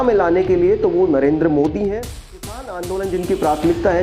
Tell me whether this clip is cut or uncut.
cut